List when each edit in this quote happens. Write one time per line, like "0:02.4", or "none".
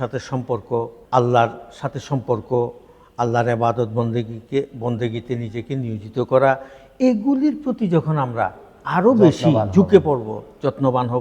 0:01.0

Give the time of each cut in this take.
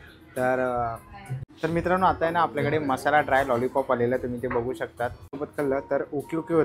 0:01.4
0:05.4

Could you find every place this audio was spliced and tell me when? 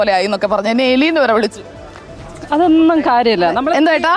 none

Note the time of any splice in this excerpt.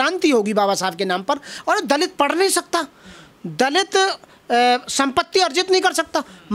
0:01.5

